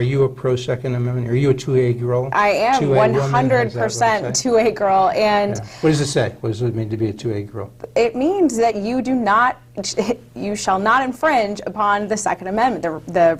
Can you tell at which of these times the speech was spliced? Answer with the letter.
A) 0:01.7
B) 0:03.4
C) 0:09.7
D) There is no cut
D